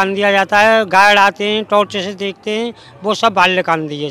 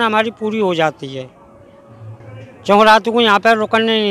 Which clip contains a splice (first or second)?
second